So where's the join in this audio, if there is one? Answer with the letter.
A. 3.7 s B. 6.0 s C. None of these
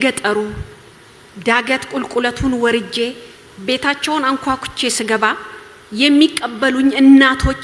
C